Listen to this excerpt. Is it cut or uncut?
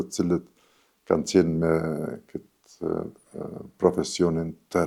uncut